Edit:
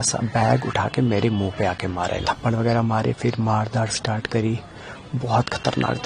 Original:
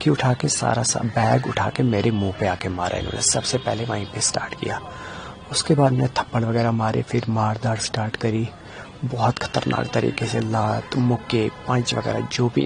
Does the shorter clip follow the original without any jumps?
no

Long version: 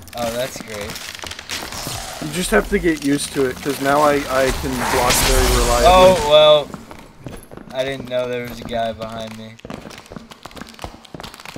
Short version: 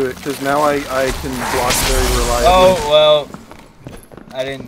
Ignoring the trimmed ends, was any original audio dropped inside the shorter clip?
no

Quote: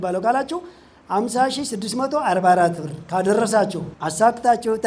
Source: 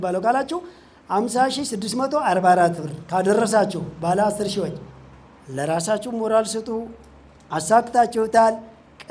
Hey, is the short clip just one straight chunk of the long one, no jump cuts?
no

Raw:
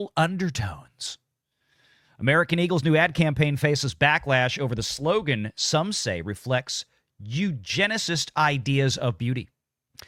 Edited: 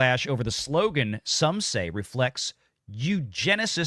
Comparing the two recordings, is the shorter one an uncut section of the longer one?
yes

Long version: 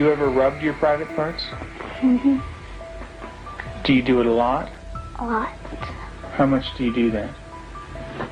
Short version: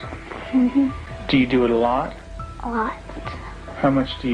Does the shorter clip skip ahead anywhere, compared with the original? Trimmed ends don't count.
yes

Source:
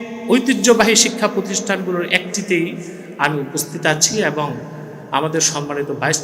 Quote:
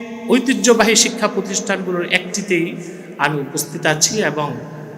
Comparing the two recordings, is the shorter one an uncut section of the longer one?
yes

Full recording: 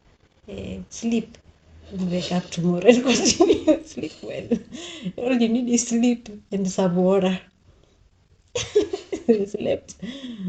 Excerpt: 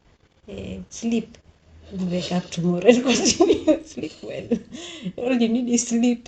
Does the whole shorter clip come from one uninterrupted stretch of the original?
yes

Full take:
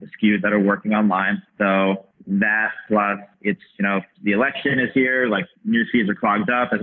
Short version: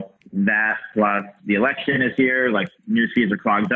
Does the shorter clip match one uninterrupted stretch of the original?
no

